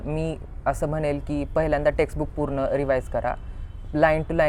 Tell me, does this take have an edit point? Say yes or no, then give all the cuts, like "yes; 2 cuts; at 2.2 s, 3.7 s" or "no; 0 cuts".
no; 0 cuts